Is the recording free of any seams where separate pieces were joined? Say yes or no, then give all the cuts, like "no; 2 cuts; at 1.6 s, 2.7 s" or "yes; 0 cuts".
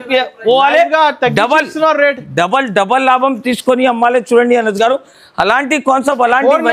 yes; 0 cuts